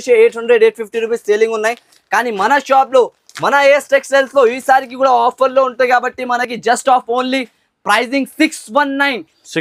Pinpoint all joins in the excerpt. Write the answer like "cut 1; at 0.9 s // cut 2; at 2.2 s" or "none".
none